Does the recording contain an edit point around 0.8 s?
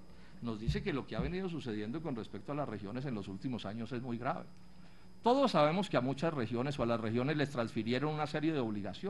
no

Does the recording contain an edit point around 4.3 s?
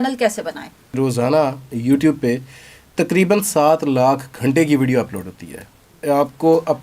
no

